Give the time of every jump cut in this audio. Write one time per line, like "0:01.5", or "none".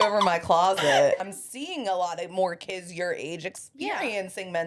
0:01.1